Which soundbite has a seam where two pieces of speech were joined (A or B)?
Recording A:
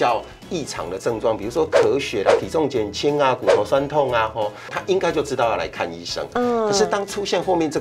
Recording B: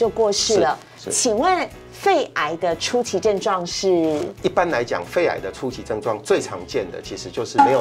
A